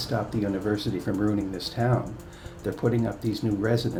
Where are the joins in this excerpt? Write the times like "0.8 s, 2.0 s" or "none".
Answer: none